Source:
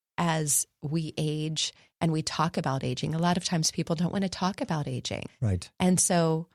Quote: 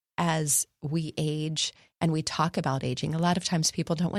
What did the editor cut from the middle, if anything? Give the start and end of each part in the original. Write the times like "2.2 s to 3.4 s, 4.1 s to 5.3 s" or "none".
none